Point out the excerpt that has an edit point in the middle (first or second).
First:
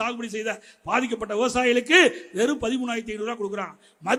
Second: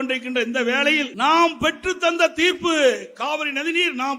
second